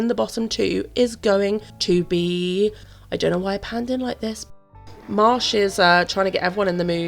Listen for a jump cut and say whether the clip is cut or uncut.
cut